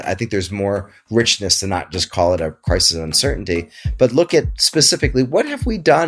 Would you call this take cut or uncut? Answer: uncut